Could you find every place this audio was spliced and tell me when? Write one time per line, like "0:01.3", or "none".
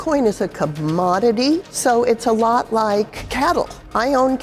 0:01.7
0:03.2